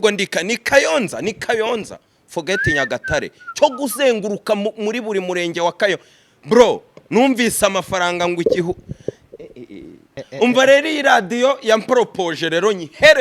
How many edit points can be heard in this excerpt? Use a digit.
1